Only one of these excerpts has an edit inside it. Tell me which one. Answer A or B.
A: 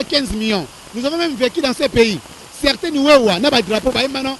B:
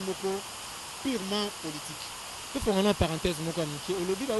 B